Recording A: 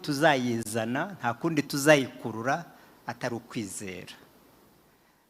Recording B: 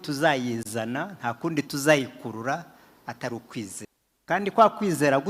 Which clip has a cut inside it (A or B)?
B